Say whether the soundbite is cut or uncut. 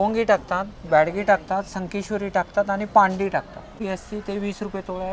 cut